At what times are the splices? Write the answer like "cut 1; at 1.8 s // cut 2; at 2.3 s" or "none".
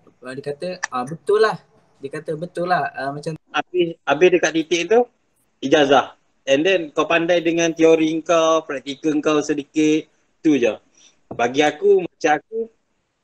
cut 1; at 3.4 s

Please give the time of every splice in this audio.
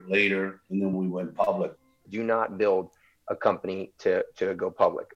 cut 1; at 0.9 s // cut 2; at 2.1 s

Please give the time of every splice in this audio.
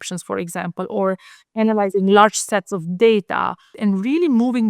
cut 1; at 3.7 s

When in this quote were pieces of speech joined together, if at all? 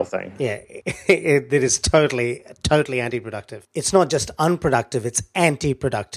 none

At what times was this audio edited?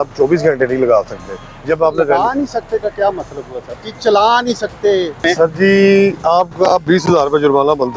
cut 1; at 5.2 s

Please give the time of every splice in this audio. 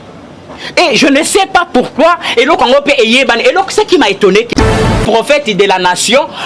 cut 1; at 4.6 s

